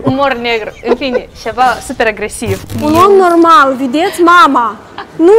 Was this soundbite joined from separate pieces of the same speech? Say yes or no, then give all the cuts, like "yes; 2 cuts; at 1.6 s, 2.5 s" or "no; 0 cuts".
yes; 1 cut; at 2.7 s